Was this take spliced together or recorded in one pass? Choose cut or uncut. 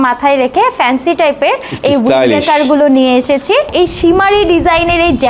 cut